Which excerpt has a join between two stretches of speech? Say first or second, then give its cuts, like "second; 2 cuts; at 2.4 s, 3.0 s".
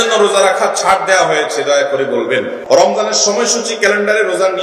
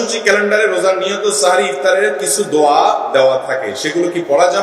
first; 1 cut; at 2.6 s